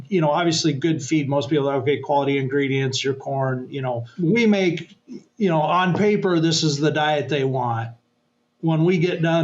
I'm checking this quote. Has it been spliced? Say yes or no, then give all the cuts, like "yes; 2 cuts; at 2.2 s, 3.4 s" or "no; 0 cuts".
yes; 1 cut; at 4.1 s